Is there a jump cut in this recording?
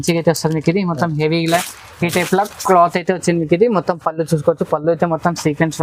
no; 0 cuts

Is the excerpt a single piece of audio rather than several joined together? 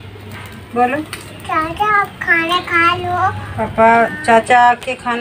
yes; 0 cuts

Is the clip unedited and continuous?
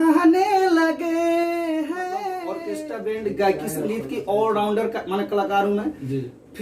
no; 1 cut; at 2.6 s

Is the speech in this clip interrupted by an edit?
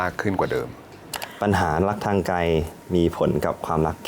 yes; 1 cut; at 0.9 s

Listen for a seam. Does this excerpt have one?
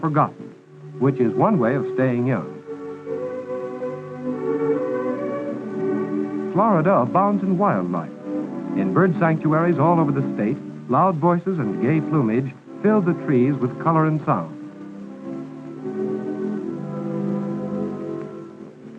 yes; 1 cut; at 1.3 s

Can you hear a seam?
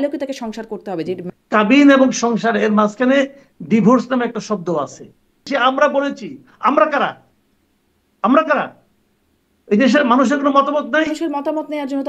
yes; 3 cuts; at 1.3 s, 5.5 s, 11.1 s

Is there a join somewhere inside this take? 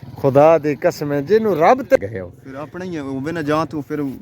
yes; 1 cut; at 2.0 s

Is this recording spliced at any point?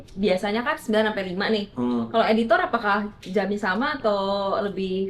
no; 0 cuts

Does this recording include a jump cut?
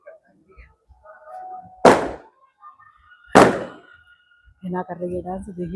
no; 0 cuts

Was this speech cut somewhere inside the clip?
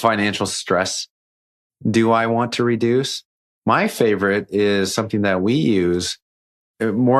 no; 0 cuts

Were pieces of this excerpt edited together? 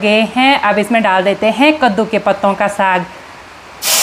no; 0 cuts

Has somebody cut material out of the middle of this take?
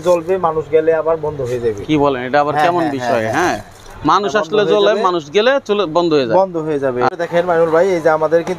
no; 0 cuts

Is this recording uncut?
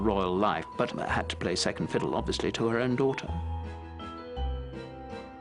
yes; 0 cuts

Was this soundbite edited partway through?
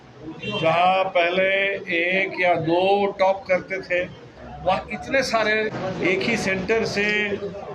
yes; 1 cut; at 5.8 s

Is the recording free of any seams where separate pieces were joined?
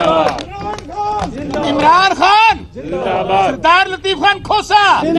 yes; 0 cuts

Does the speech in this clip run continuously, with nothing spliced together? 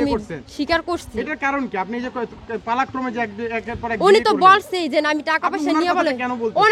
yes; 0 cuts

